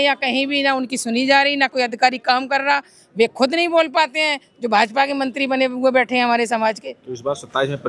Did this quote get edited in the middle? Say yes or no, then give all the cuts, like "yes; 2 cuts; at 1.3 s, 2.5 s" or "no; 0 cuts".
no; 0 cuts